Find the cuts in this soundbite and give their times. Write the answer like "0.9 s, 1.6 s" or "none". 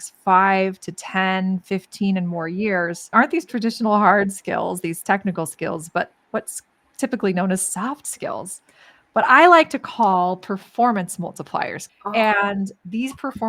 3.0 s, 11.8 s